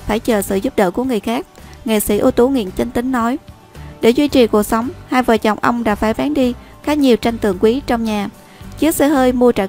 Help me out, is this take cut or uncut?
uncut